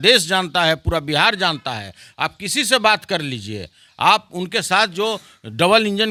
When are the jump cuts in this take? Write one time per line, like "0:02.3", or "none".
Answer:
none

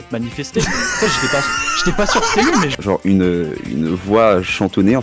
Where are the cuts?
0:02.8

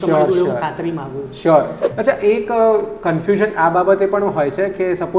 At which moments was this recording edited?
0:01.8

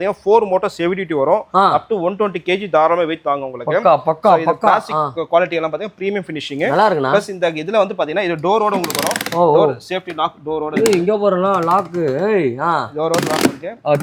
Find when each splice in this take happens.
none

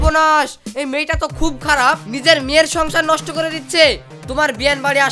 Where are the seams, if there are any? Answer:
0:04.1

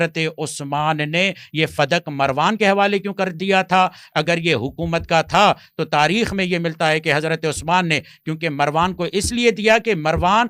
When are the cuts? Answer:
none

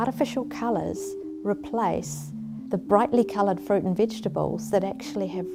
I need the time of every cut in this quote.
none

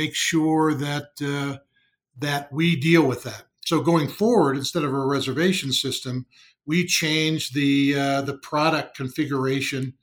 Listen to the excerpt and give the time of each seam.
none

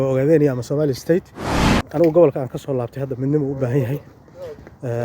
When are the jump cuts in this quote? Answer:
0:01.8

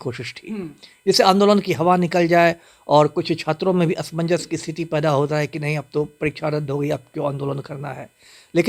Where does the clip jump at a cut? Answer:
none

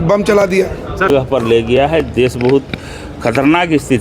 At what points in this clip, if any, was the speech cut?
0:01.1

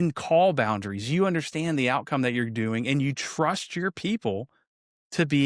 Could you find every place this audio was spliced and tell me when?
none

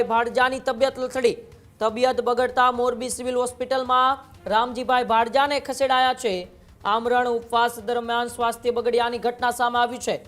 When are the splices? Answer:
none

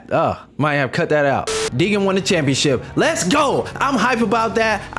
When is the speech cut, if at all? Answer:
0:01.7

